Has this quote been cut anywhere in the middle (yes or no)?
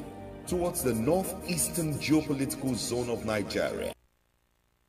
yes